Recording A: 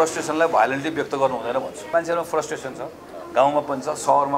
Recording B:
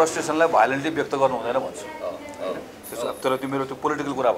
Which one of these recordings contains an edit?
A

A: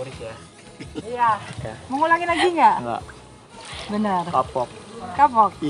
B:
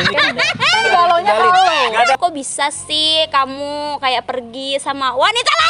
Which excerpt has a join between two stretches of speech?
B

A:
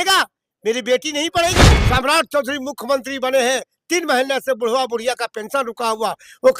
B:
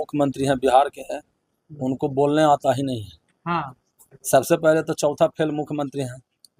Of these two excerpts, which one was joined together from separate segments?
A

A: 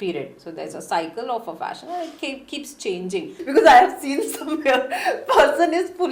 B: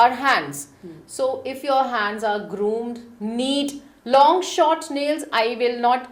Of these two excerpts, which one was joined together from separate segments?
A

